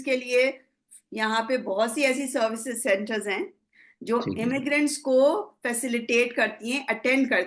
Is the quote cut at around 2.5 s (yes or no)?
no